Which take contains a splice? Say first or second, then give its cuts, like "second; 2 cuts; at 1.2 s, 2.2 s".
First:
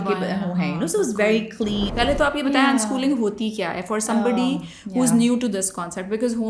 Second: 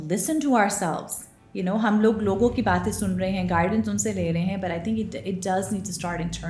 first; 1 cut; at 1.9 s